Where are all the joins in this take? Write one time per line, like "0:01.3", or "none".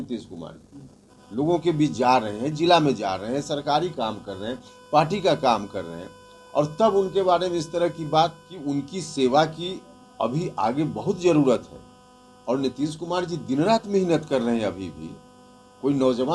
0:08.5